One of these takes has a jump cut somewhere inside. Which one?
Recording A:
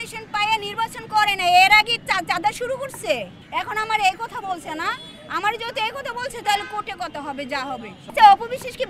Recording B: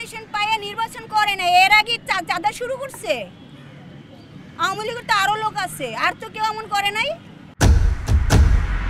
A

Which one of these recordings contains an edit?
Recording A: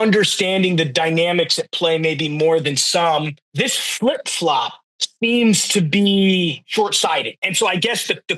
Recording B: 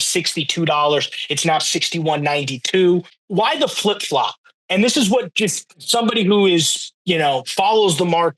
B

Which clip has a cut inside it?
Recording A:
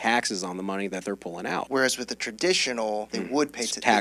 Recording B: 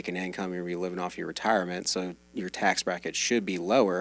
A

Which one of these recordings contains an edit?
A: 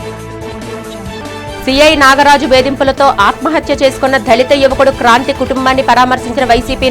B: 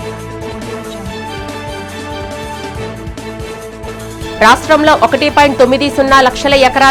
A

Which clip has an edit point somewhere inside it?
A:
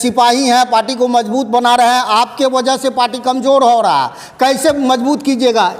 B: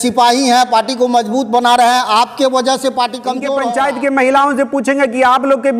B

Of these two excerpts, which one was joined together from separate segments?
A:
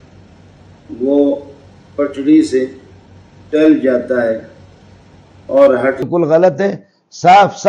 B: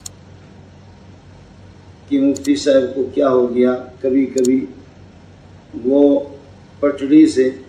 A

